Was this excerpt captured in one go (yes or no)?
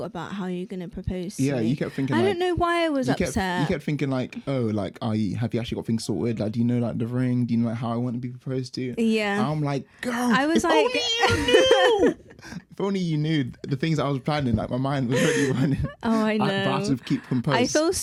yes